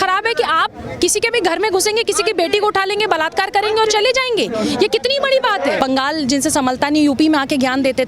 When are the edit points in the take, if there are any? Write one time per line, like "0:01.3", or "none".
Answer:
0:05.8